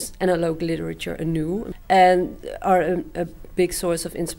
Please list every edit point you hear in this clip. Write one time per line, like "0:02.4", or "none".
0:01.7